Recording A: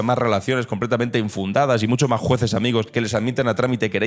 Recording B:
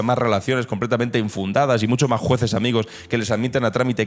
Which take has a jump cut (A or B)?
A